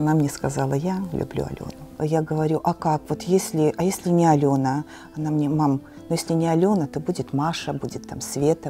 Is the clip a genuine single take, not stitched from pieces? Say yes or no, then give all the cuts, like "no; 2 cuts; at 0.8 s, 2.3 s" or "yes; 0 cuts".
yes; 0 cuts